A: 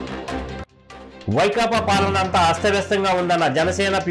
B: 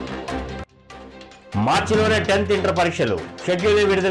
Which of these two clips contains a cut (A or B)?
A